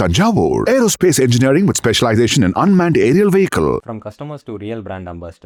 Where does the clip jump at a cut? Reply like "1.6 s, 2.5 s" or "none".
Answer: none